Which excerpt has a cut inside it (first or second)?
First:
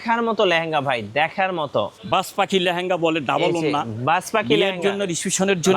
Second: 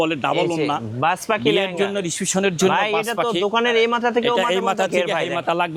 first